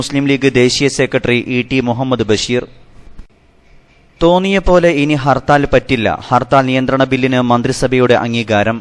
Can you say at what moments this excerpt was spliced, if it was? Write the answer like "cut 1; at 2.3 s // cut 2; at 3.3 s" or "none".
cut 1; at 3.3 s

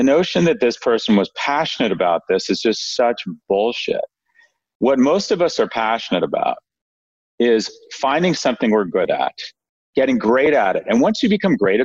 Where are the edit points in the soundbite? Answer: none

